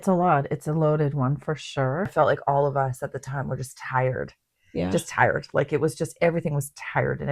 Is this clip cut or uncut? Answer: cut